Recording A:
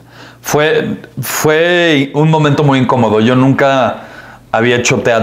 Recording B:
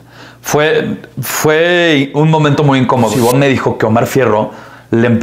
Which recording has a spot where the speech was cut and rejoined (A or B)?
B